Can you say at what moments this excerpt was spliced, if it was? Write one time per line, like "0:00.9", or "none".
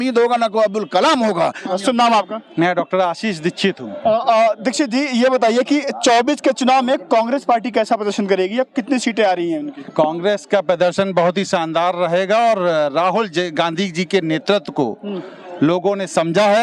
none